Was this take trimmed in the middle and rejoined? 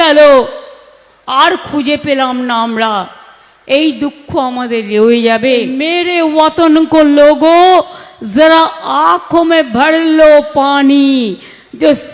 yes; 1 cut; at 5.9 s

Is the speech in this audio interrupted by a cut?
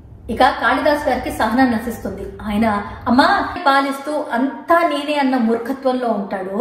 yes; 1 cut; at 3.6 s

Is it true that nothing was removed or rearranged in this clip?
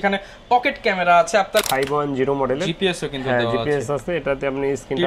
no; 1 cut; at 1.6 s

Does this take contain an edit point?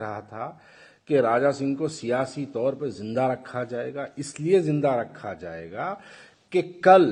no; 0 cuts

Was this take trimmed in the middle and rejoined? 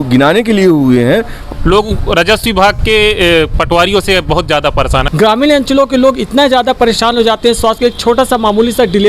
yes; 2 cuts; at 1.4 s, 5.1 s

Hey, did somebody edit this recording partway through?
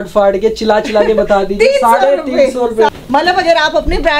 yes; 1 cut; at 2.9 s

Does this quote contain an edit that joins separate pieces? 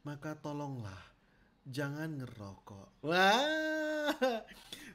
yes; 1 cut; at 2.9 s

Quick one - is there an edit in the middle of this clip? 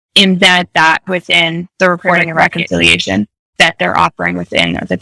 yes; 2 cuts; at 2.5 s, 3.5 s

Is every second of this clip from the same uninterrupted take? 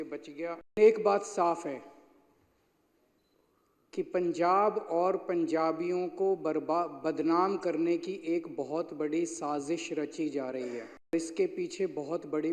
no; 2 cuts; at 0.8 s, 11.1 s

